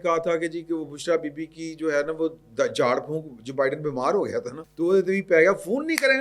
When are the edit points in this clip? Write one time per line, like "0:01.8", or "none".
0:04.6